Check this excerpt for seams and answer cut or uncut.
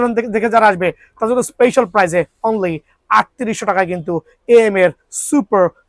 uncut